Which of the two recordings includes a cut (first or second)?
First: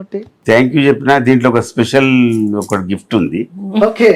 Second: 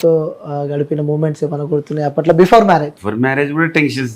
second